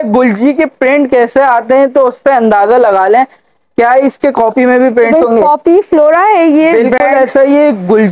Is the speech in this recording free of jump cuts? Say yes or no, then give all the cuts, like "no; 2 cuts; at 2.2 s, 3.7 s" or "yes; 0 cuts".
yes; 0 cuts